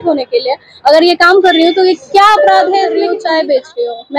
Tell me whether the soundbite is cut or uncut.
cut